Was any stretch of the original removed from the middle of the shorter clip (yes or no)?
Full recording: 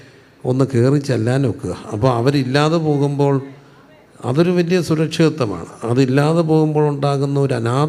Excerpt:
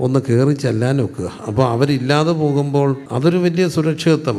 yes